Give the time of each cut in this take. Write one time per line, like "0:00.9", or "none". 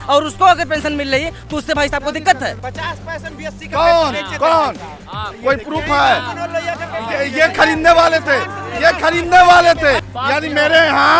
0:02.6
0:10.1